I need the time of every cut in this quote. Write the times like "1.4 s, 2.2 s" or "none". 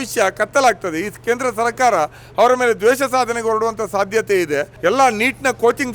4.7 s